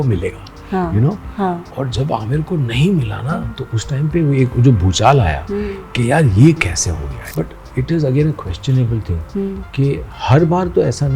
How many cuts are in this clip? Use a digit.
1